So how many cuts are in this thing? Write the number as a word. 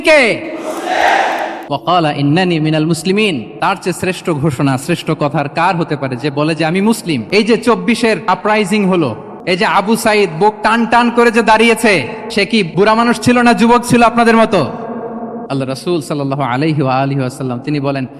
seven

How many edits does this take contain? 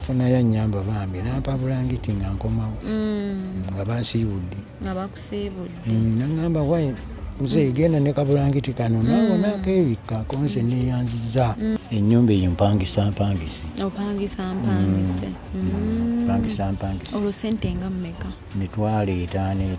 one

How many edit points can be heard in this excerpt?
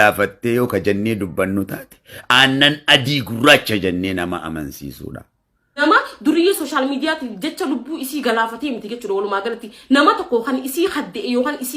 one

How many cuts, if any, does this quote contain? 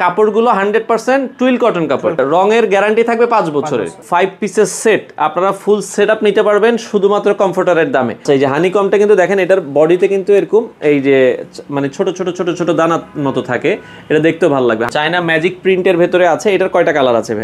four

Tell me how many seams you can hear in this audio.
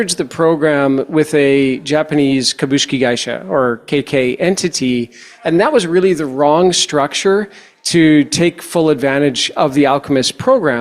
zero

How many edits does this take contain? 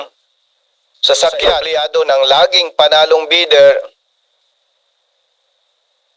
one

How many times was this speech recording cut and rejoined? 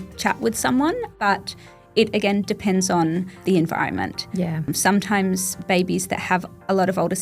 three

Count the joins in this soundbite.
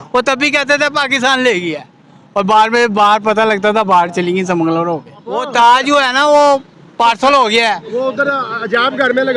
one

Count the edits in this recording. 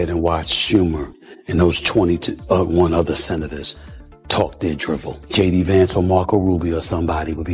one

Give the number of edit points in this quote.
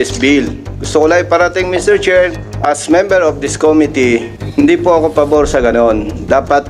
two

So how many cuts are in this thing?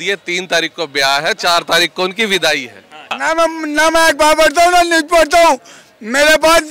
one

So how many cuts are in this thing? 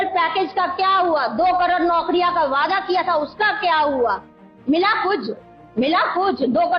one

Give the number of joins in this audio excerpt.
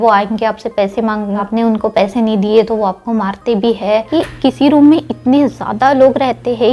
two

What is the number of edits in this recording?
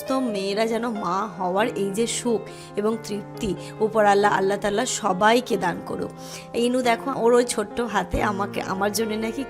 one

